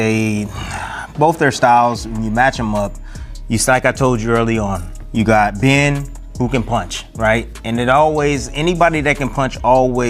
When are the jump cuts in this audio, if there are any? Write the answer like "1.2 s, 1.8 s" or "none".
none